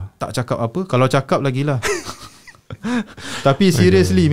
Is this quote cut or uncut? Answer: uncut